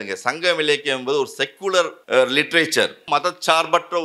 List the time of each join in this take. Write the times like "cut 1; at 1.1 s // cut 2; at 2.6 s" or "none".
cut 1; at 2.0 s // cut 2; at 3.0 s